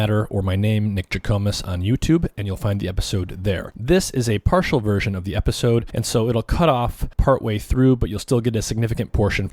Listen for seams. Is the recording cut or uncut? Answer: uncut